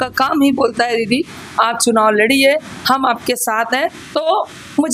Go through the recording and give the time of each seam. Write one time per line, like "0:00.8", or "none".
none